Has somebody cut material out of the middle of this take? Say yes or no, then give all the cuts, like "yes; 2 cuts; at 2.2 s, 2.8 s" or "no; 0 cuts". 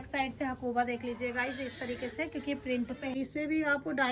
yes; 1 cut; at 3.2 s